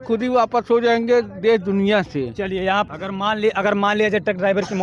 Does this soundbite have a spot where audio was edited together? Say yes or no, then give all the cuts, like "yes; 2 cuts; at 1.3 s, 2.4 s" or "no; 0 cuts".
yes; 1 cut; at 2.9 s